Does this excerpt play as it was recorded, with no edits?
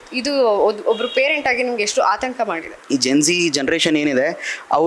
no; 1 cut; at 2.7 s

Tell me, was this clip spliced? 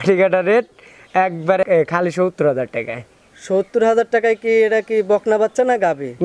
yes; 1 cut; at 1.6 s

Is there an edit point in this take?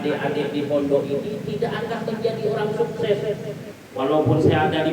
yes; 1 cut; at 3.6 s

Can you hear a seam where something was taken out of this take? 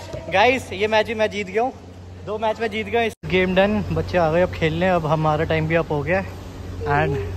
yes; 1 cut; at 3.1 s

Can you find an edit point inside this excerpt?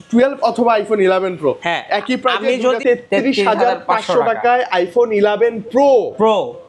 yes; 1 cut; at 2.8 s

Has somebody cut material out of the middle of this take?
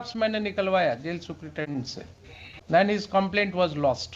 yes; 1 cut; at 2.7 s

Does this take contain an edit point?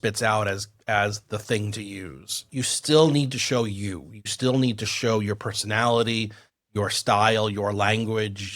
yes; 1 cut; at 2.5 s

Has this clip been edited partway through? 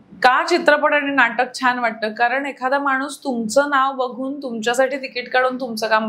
no; 0 cuts

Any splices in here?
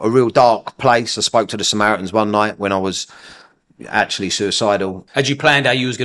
yes; 1 cut; at 5.0 s

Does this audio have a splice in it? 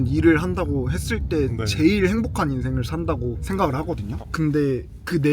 yes; 1 cut; at 3.4 s

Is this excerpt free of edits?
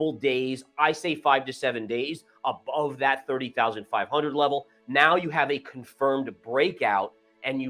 yes; 0 cuts

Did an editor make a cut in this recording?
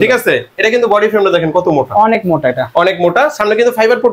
no; 0 cuts

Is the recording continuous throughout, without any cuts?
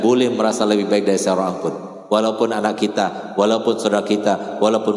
yes; 0 cuts

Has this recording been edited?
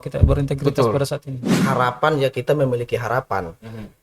yes; 1 cut; at 1.5 s

